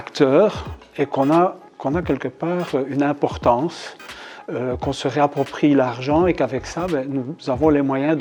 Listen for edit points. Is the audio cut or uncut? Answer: uncut